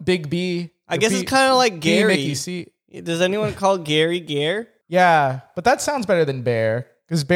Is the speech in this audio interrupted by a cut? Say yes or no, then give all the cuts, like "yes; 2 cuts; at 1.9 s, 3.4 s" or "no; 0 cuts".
yes; 1 cut; at 4.7 s